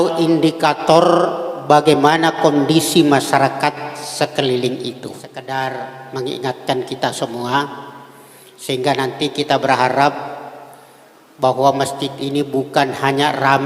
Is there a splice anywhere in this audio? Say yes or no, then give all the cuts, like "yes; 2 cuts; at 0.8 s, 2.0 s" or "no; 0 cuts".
yes; 1 cut; at 5.3 s